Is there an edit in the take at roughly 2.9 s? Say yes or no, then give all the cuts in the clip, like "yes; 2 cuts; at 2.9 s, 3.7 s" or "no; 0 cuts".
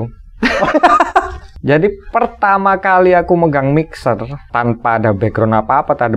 no; 2 cuts; at 1.4 s, 4.4 s